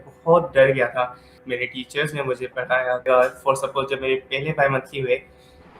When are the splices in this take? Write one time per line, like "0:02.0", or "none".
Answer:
0:01.4
0:03.0